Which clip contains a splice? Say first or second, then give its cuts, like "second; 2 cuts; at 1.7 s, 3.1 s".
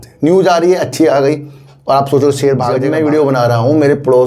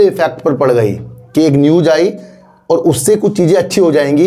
first; 1 cut; at 2.8 s